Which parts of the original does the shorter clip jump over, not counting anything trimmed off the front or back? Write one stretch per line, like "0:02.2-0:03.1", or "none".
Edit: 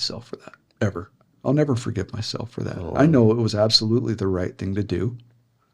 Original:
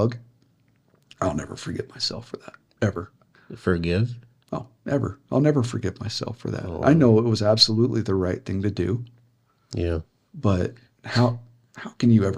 0:03.3-0:05.2